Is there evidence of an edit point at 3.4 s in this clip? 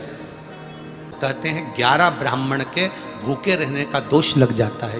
no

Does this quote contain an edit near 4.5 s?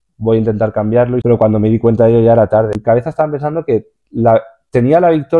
no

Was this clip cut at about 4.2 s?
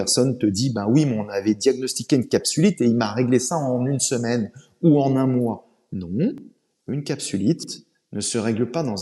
no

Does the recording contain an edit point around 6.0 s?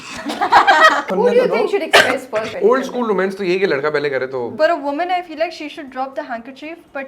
no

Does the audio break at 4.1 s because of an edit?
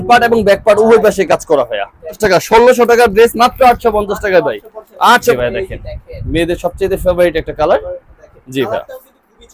no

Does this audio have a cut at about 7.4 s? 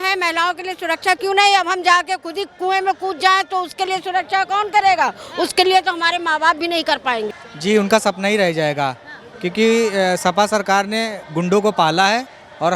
yes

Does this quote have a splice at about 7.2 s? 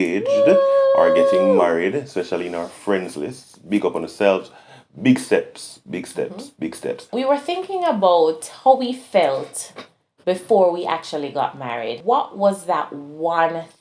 yes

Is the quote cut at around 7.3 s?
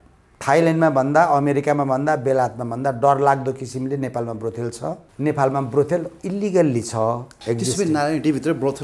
yes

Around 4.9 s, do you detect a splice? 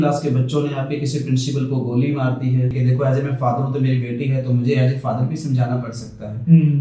no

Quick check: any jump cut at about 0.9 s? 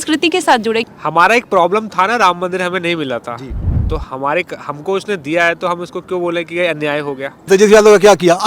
yes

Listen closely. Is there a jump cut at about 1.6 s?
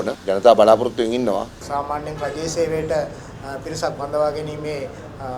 yes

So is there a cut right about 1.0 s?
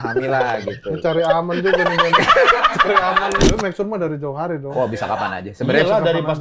no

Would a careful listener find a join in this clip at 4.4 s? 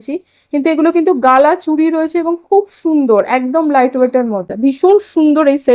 yes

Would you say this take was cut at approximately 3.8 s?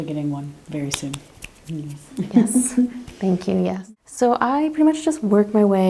yes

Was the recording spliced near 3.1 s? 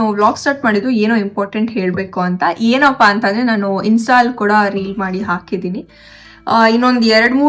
no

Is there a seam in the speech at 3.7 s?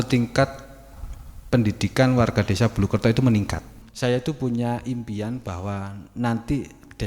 yes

